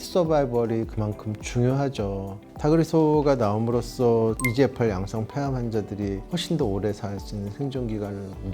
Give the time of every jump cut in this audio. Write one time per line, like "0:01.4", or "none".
0:02.4